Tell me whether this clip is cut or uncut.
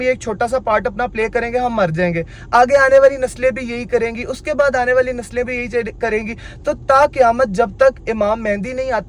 uncut